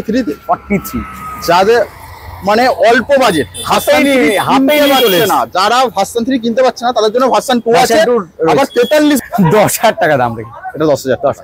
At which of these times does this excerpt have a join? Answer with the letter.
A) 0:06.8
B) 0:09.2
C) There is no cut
B